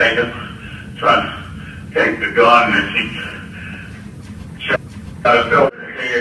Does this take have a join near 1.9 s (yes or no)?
no